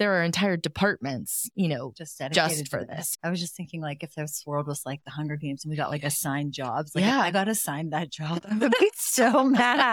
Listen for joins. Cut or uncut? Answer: cut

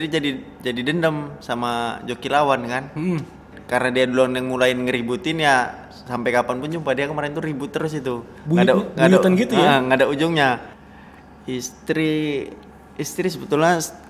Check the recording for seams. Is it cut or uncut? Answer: cut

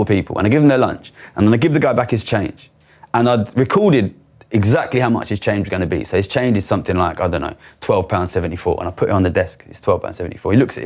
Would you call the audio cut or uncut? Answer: uncut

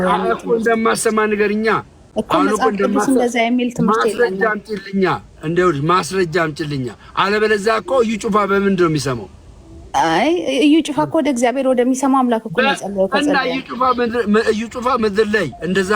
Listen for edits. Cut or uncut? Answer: uncut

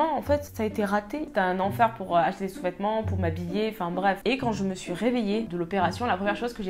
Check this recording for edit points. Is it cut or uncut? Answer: cut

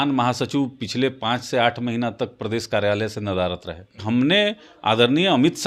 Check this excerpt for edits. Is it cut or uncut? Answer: cut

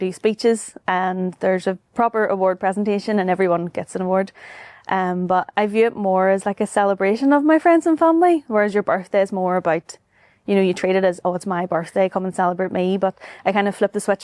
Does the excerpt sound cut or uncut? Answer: uncut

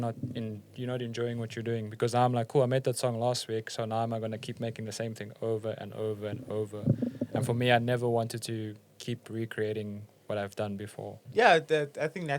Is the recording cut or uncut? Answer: cut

